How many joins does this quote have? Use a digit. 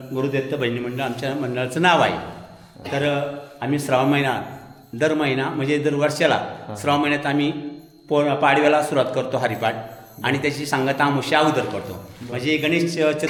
0